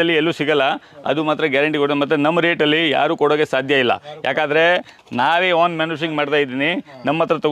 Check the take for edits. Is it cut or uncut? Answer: uncut